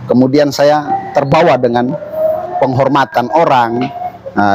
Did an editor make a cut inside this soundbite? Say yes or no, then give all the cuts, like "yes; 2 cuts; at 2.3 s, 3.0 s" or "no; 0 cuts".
no; 0 cuts